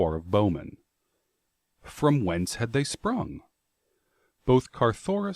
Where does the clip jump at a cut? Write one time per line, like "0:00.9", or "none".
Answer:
0:02.1